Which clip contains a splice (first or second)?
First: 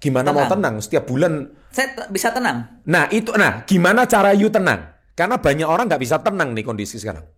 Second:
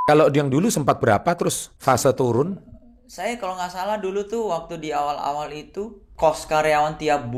second